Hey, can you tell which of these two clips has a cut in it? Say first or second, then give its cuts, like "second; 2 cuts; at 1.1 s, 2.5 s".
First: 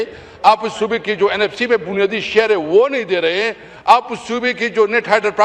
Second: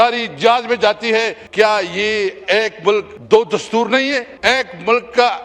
second; 3 cuts; at 1.4 s, 3.1 s, 4.3 s